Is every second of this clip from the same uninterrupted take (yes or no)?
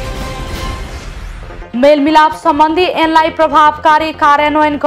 yes